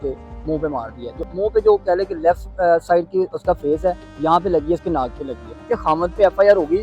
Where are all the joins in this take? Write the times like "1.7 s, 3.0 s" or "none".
1.3 s, 5.7 s